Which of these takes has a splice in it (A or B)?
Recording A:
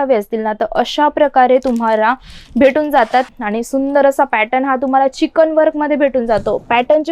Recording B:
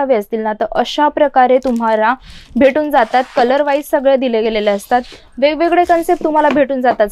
A